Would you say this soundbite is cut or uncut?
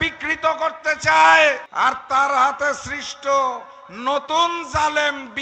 cut